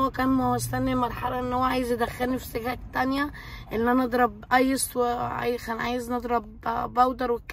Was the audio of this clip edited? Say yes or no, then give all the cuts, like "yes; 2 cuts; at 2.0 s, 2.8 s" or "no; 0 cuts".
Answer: no; 0 cuts